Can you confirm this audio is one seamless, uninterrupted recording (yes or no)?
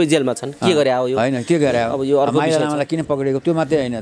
yes